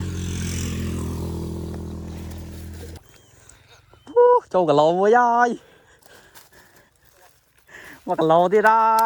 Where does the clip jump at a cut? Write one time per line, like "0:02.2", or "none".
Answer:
0:03.0